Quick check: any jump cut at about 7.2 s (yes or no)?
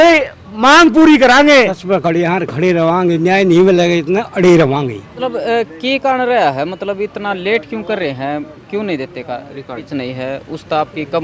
no